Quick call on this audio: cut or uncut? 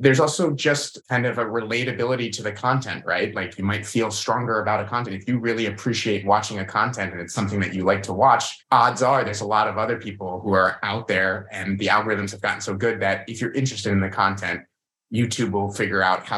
cut